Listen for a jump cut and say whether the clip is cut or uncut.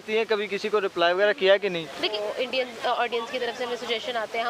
cut